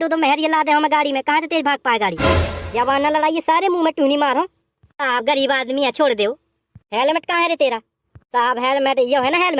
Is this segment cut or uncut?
uncut